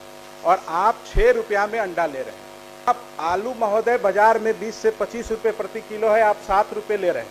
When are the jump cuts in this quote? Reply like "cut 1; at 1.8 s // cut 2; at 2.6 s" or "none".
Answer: cut 1; at 2.9 s